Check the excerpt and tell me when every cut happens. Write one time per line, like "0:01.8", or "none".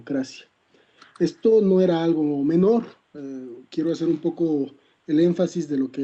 0:03.3